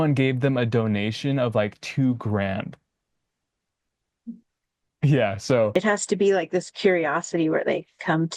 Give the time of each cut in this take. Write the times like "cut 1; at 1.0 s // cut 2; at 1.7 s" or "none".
cut 1; at 5.7 s